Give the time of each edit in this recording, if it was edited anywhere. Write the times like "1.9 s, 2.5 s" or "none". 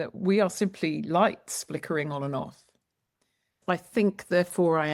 3.6 s